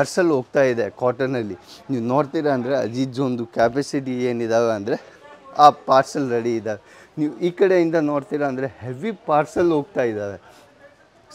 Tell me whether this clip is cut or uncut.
uncut